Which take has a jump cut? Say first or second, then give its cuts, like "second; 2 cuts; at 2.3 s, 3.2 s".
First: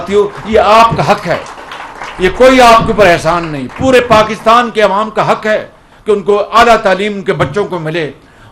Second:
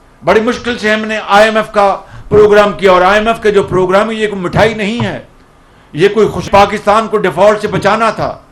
second; 1 cut; at 6.5 s